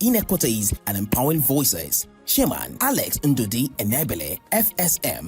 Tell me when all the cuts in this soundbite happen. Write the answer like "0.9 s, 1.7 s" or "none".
1.2 s